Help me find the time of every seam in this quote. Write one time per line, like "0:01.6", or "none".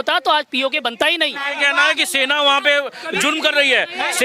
0:01.5